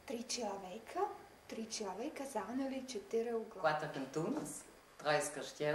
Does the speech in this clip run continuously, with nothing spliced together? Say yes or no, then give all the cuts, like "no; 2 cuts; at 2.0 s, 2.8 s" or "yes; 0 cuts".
no; 1 cut; at 3.5 s